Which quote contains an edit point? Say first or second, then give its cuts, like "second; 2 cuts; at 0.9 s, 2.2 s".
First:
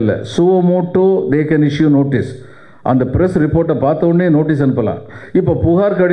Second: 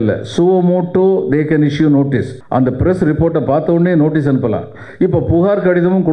second; 1 cut; at 2.4 s